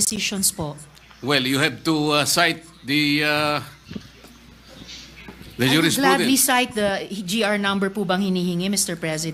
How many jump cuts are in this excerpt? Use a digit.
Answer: 1